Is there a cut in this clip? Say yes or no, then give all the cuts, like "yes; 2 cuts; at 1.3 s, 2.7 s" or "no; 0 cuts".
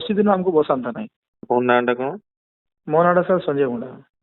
yes; 1 cut; at 1.4 s